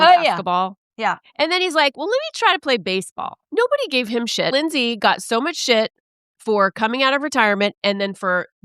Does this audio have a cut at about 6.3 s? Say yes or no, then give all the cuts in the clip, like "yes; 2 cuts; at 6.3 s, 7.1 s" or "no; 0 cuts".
no; 2 cuts; at 3.4 s, 4.5 s